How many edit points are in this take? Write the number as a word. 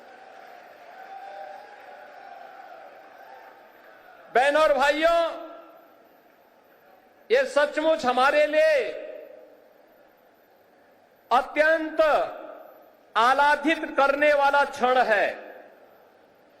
one